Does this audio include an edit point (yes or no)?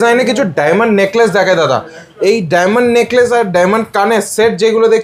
no